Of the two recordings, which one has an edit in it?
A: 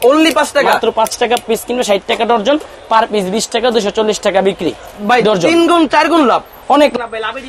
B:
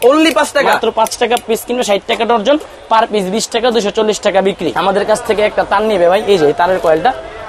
B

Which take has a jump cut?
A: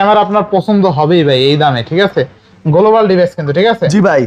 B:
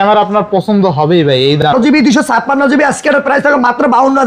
B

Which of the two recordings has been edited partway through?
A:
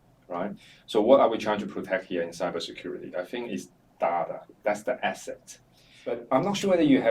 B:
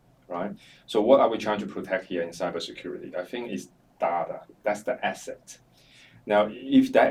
A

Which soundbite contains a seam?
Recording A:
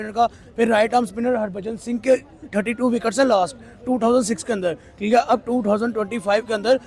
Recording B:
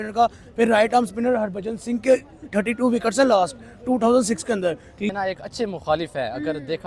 B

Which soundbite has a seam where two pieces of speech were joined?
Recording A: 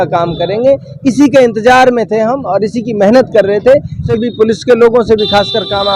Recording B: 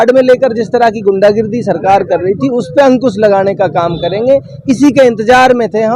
A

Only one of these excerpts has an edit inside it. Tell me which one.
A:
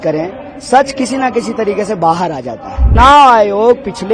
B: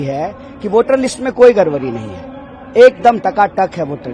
A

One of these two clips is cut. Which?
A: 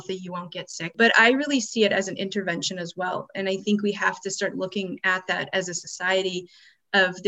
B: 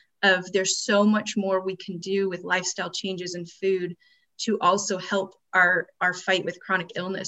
A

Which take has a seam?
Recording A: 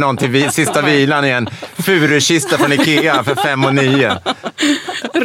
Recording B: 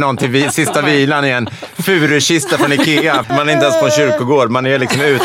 B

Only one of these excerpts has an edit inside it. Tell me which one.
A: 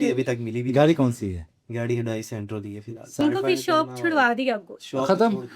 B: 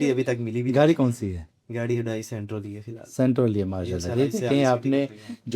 A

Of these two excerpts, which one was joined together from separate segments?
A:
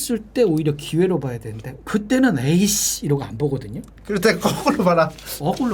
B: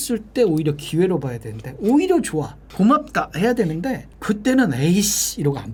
A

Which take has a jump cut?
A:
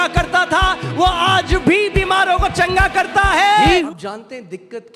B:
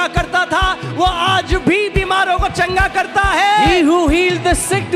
A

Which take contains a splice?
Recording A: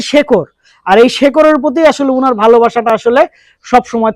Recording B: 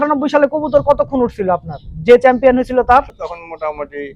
B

